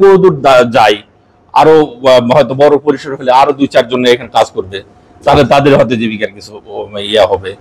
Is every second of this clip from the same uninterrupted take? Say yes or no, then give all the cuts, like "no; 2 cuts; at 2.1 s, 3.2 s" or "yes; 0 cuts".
yes; 0 cuts